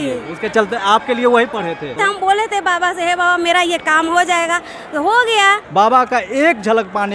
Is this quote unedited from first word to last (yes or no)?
no